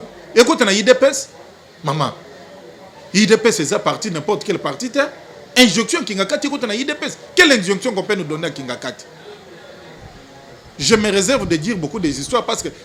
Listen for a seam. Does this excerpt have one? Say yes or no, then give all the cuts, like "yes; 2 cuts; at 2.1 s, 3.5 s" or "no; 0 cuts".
no; 0 cuts